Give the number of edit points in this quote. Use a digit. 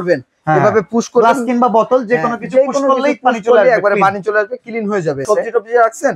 1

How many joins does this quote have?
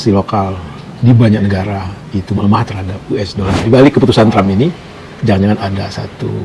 1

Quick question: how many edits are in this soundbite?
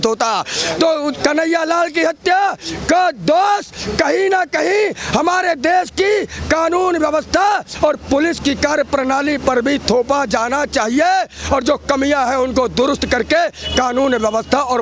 0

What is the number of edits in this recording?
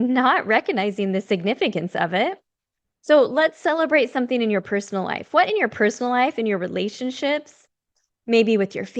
0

